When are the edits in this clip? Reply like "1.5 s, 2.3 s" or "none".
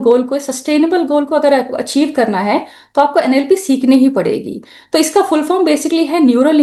none